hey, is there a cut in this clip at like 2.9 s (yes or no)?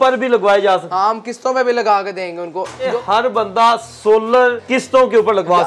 yes